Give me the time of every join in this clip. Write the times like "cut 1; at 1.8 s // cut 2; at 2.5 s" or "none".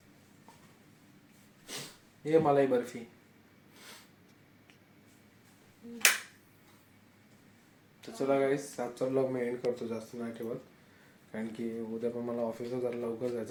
none